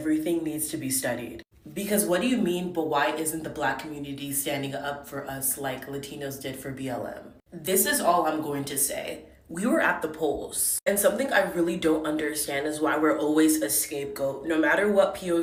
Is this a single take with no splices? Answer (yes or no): yes